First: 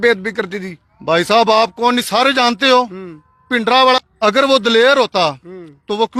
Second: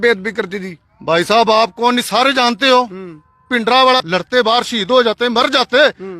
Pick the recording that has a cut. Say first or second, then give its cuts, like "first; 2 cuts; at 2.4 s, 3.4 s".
second; 1 cut; at 4.1 s